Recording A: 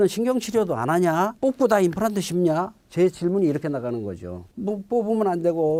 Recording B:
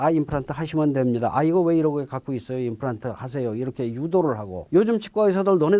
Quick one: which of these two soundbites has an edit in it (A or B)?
B